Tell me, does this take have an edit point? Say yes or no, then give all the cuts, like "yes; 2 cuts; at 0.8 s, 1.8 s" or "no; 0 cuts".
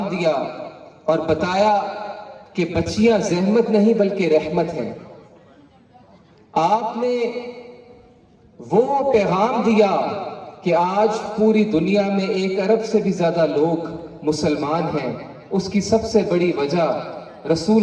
no; 0 cuts